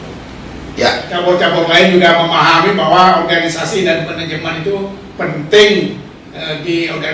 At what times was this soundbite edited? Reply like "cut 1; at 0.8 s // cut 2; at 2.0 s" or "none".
cut 1; at 1.1 s